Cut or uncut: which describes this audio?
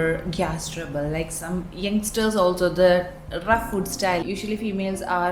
cut